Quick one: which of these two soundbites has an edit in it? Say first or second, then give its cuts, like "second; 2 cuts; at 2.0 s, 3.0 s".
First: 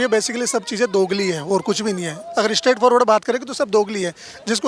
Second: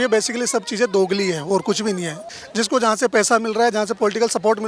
second; 1 cut; at 2.2 s